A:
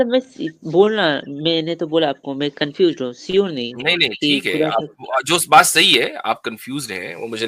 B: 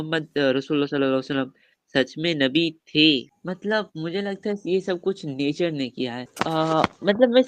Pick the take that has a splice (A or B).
B